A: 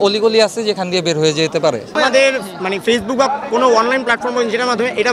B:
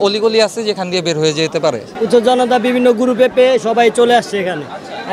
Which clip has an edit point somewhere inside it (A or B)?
B